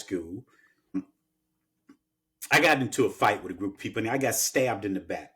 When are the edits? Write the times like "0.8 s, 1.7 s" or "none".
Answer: 1.0 s